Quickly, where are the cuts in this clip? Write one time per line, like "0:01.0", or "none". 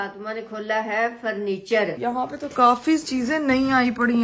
0:01.9